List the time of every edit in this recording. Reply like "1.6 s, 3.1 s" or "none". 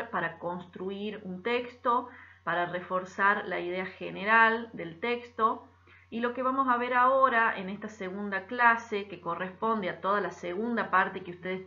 4.0 s